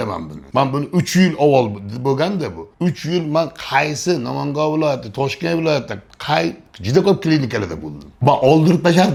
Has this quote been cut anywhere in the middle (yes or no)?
no